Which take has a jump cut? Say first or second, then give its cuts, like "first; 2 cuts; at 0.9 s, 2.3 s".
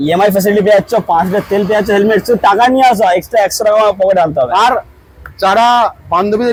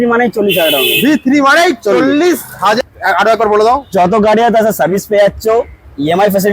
second; 1 cut; at 2.8 s